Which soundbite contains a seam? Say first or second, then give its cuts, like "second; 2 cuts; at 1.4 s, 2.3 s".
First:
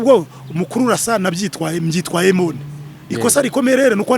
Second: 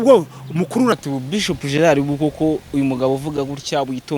second; 1 cut; at 0.9 s